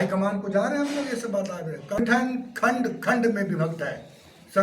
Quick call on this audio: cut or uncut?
cut